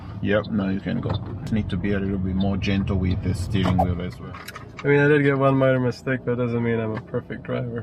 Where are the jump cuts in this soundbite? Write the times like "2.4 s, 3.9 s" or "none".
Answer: 1.5 s, 4.2 s